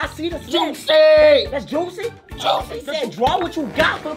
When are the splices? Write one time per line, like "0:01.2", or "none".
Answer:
0:02.7